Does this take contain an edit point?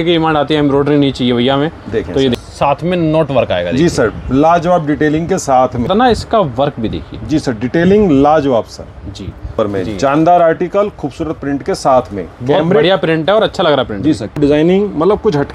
yes; 4 cuts; at 2.4 s, 5.9 s, 9.5 s, 14.4 s

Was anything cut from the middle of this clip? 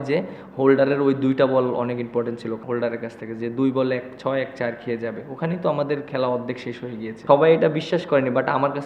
yes; 2 cuts; at 2.6 s, 7.1 s

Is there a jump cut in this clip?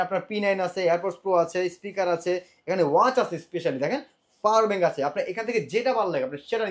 no; 0 cuts

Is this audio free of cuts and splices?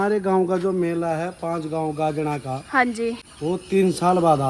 no; 1 cut; at 3.3 s

